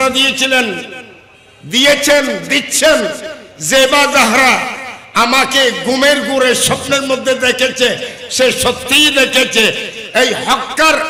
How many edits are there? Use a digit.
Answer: 0